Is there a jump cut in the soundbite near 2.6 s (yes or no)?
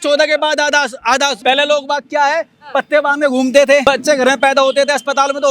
no